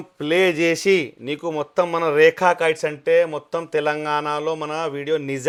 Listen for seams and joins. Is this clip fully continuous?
yes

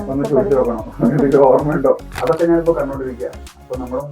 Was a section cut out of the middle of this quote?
yes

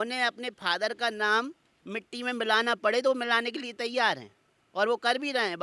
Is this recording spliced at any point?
no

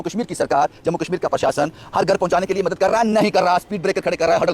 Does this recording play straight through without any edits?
yes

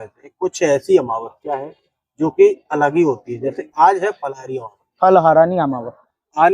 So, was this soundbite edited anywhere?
no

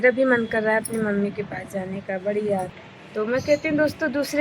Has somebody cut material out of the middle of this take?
yes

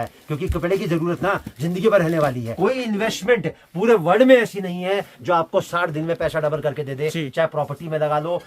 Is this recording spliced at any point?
yes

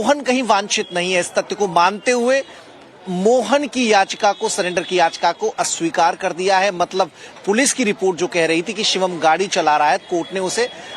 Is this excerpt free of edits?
no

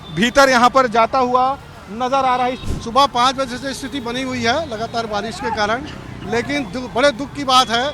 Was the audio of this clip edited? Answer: yes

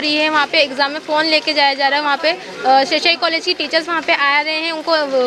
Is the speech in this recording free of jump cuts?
yes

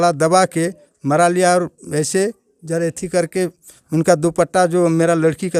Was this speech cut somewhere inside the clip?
no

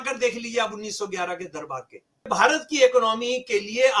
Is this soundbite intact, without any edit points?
no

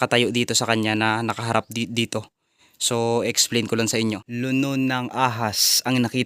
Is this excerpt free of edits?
no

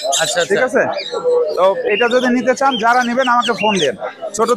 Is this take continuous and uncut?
yes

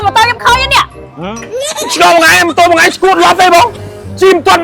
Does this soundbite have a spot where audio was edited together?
no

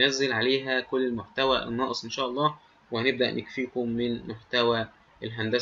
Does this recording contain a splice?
no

